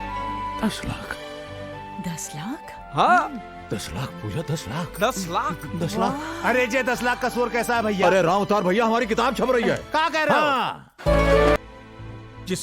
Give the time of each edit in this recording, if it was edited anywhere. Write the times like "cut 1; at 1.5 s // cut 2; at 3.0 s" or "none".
cut 1; at 11.6 s